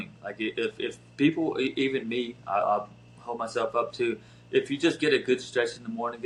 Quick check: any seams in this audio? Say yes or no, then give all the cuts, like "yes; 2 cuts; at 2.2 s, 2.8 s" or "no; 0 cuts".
no; 0 cuts